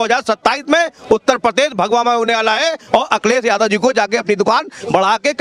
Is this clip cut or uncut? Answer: uncut